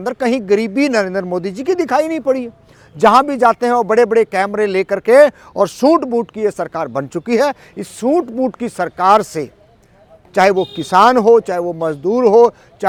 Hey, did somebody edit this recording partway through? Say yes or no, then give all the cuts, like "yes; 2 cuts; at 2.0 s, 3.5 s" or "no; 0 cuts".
no; 0 cuts